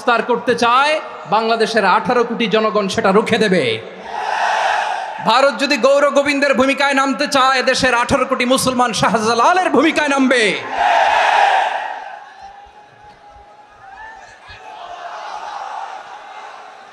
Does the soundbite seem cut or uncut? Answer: uncut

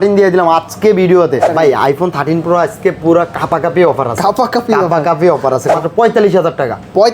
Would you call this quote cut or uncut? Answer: cut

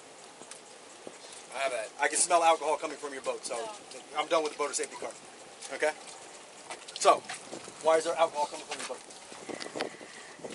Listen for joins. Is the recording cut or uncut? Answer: uncut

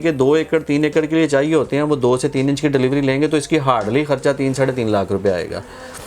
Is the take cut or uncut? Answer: uncut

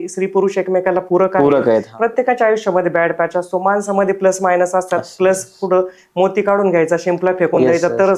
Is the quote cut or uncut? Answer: cut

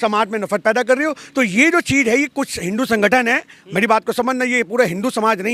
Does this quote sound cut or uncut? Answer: uncut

